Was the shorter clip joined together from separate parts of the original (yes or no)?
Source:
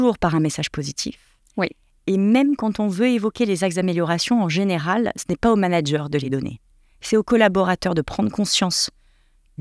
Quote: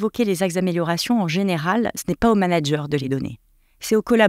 no